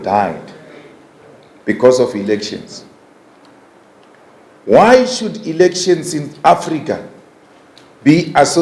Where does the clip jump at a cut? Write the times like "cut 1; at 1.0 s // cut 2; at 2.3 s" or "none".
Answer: none